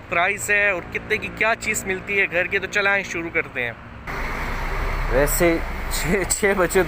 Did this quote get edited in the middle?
yes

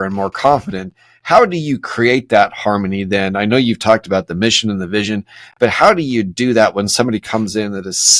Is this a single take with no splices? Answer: yes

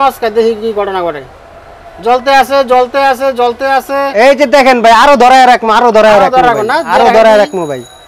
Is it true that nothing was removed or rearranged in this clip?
yes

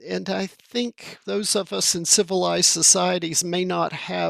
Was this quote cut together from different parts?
yes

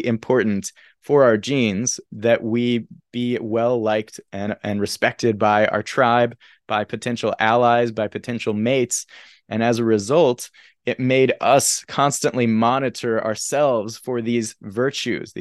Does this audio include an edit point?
yes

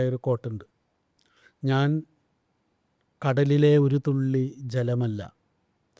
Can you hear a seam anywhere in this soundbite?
no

